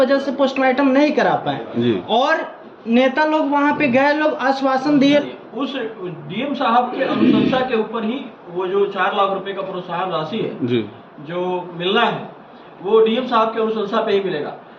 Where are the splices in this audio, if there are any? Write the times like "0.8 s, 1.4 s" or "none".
5.2 s